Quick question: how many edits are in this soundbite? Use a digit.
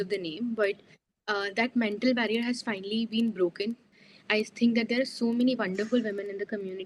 1